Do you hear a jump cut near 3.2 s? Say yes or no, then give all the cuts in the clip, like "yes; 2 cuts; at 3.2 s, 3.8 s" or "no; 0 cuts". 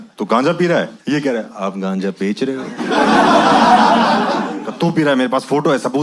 no; 2 cuts; at 1.0 s, 4.6 s